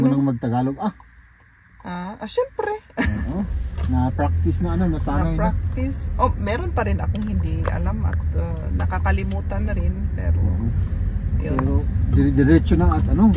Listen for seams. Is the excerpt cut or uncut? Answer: uncut